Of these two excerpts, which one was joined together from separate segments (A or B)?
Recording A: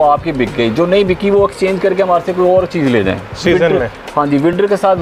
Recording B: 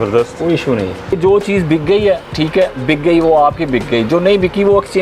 B